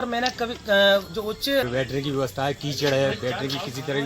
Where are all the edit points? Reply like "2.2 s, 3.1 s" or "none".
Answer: 1.7 s